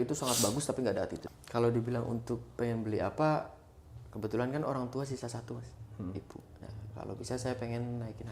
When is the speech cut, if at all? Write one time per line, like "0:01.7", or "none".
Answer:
0:01.2